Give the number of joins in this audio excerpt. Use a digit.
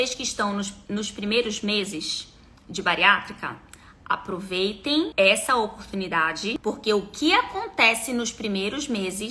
2